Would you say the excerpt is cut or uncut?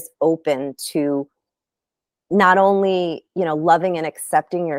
uncut